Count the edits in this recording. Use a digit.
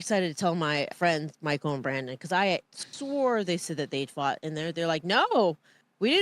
1